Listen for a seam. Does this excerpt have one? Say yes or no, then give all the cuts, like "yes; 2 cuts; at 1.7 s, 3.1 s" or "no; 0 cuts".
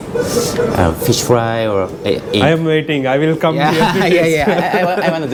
no; 0 cuts